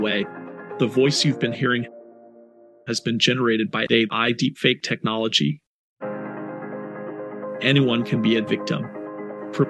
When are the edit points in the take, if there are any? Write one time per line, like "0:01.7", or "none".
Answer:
none

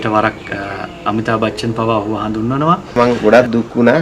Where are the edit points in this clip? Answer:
0:02.9

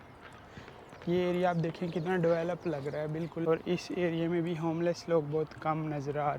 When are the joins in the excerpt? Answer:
0:03.4

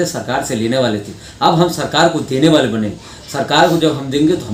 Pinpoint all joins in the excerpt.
none

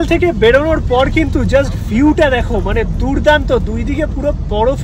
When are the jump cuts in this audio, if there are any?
none

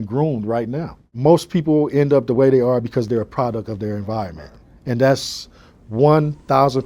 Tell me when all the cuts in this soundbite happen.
none

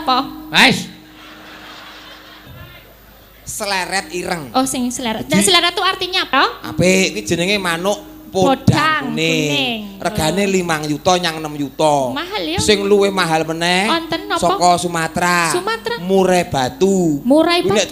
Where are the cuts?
0:02.5
0:06.3

